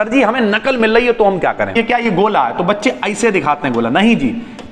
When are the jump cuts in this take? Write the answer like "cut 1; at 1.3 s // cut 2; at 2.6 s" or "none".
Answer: cut 1; at 1.7 s